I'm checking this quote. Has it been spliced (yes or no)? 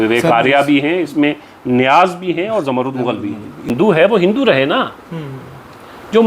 yes